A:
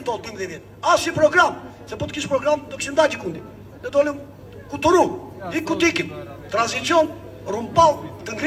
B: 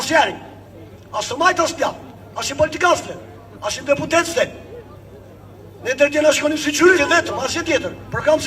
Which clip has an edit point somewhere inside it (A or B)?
B